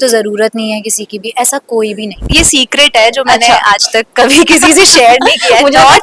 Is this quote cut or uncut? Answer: cut